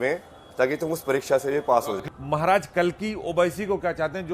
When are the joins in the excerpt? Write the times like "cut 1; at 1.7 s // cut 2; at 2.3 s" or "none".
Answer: cut 1; at 2.1 s